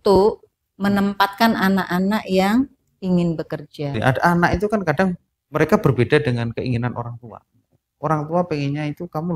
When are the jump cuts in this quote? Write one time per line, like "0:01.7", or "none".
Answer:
0:04.0